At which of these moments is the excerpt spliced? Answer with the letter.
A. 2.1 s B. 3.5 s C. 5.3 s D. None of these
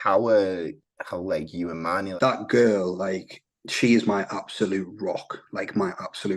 A